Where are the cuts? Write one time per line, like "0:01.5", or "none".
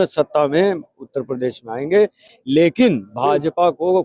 none